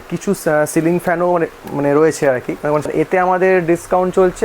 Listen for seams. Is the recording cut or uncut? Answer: cut